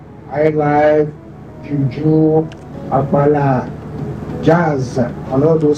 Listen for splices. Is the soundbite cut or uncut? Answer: uncut